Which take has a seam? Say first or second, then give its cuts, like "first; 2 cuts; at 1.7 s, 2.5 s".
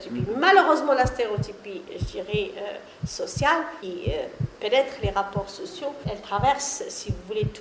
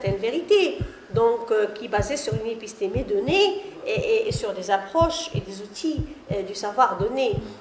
first; 2 cuts; at 3.8 s, 6.1 s